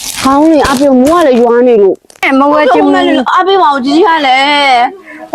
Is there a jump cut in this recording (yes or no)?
yes